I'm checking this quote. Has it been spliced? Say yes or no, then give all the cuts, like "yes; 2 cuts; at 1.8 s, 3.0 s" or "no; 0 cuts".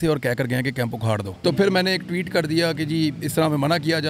yes; 1 cut; at 1.3 s